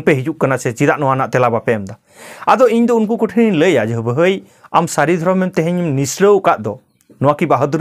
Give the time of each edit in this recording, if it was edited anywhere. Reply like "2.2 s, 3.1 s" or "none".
none